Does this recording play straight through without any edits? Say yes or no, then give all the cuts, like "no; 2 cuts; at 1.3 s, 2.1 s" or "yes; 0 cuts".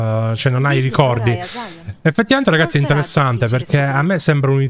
yes; 0 cuts